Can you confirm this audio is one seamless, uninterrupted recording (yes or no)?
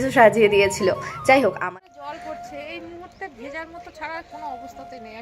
no